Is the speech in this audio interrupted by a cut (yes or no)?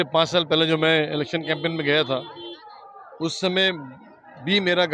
no